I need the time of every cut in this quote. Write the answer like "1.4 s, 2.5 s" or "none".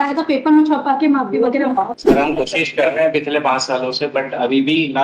2.0 s

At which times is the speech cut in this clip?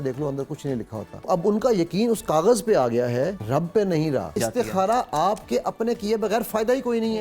1.2 s, 3.4 s, 4.3 s

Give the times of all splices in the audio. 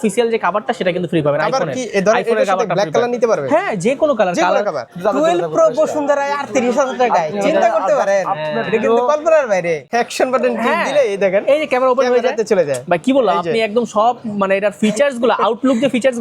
4.8 s, 9.9 s

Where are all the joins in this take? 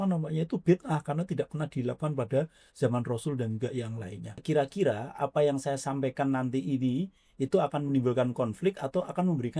4.4 s

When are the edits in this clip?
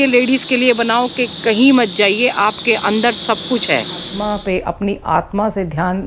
4.1 s

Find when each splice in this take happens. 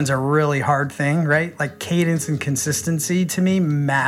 none

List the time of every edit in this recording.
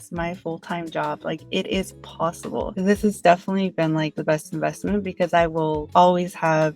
2.7 s

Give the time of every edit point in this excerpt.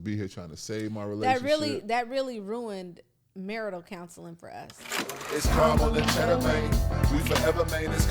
4.8 s

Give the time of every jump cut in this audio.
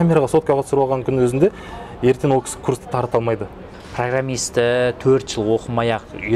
3.8 s

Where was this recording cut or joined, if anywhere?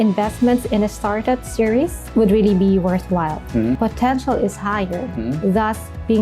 3.8 s

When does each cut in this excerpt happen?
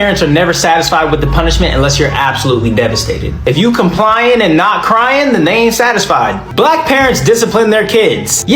6.5 s

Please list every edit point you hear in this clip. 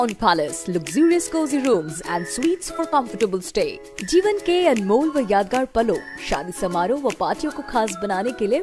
none

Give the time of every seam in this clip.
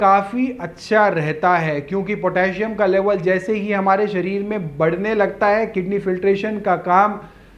none

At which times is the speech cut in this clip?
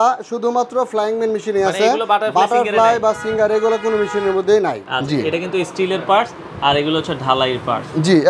4.9 s

